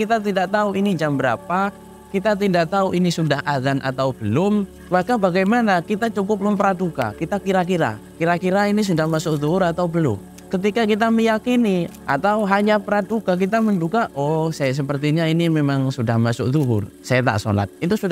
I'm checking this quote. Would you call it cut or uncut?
cut